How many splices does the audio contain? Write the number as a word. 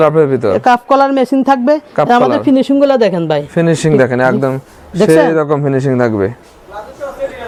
zero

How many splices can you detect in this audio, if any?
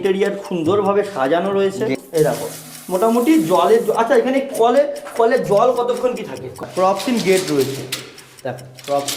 two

